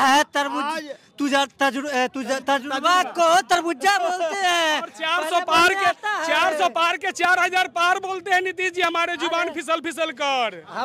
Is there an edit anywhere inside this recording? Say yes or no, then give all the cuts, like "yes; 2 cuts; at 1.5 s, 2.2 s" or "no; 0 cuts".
no; 0 cuts